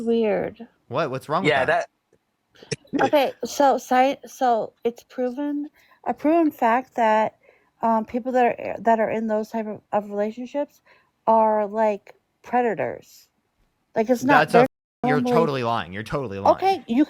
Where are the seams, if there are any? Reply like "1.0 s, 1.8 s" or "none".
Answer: none